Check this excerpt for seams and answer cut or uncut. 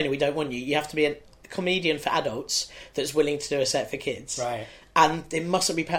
uncut